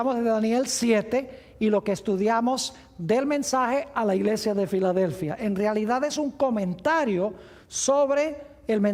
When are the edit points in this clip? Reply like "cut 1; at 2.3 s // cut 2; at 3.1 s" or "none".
none